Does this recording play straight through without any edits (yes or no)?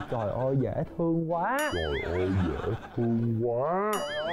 yes